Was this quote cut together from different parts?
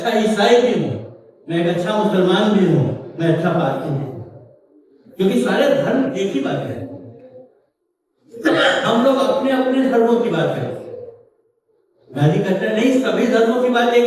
no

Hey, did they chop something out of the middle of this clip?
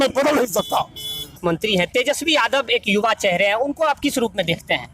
yes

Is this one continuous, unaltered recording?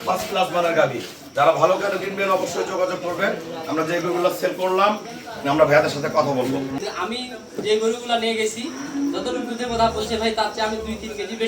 no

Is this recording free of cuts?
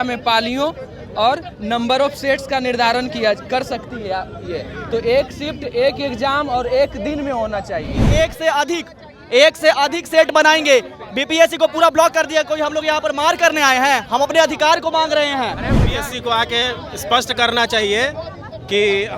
no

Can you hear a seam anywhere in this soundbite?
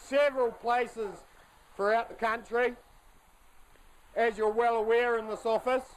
no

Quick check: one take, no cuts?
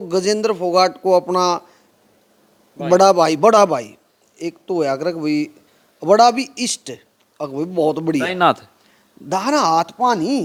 yes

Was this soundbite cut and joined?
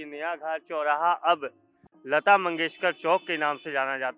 no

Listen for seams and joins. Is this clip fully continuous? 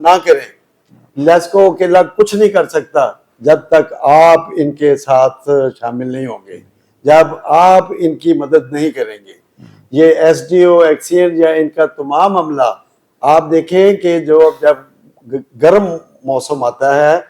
yes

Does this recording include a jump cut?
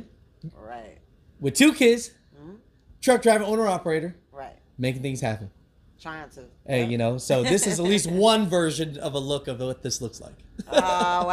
no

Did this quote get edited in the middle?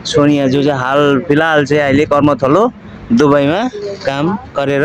no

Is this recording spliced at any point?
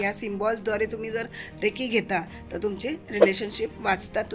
no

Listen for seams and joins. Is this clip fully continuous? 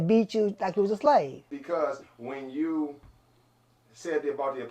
no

